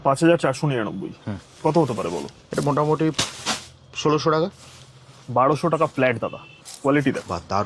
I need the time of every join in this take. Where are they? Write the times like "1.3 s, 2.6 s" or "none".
2.4 s, 6.5 s